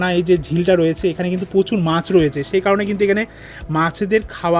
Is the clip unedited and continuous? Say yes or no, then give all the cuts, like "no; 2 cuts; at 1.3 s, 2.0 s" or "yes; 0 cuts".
yes; 0 cuts